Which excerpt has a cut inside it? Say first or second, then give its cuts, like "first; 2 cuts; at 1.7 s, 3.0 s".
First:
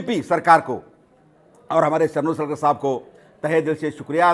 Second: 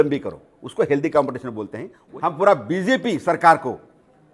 second; 1 cut; at 2.0 s